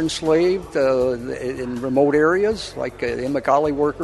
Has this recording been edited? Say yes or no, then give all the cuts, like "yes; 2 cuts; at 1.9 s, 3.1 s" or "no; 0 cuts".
no; 0 cuts